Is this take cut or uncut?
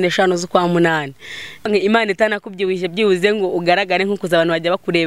cut